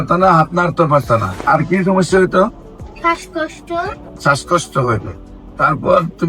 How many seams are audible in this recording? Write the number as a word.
two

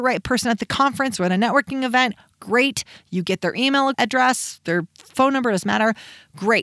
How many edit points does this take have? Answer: one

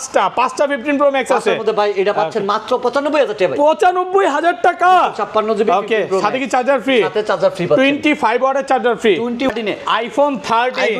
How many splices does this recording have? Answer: one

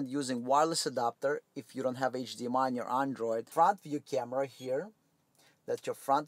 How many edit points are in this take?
one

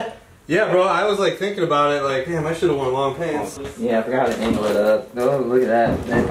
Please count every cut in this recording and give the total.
one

